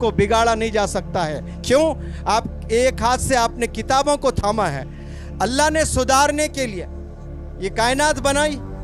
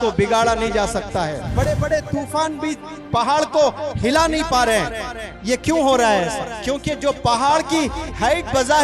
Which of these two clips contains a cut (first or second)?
second